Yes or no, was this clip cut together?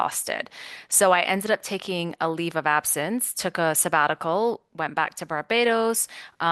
no